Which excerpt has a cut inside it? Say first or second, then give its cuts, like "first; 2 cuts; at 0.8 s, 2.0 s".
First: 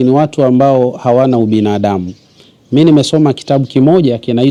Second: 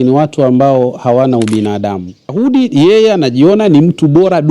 second; 1 cut; at 2.3 s